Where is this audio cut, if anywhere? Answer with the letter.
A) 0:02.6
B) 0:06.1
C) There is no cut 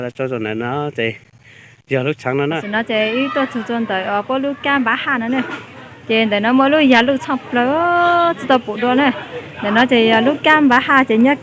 A